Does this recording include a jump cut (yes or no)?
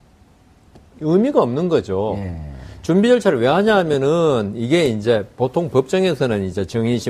no